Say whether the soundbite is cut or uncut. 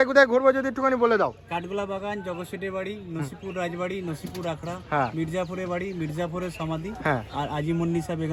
uncut